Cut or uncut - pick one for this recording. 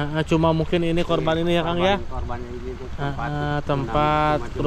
uncut